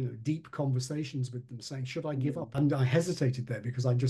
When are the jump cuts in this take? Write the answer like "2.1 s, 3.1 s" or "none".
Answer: 2.5 s